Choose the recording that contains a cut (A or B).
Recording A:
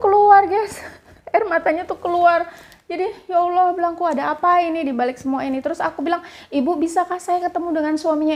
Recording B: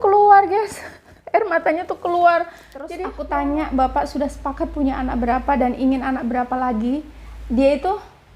B